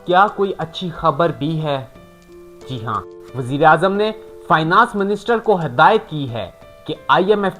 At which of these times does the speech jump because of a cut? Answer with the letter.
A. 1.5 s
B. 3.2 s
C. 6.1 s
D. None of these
B